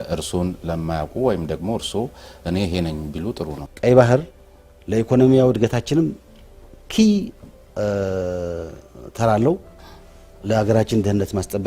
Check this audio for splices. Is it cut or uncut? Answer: cut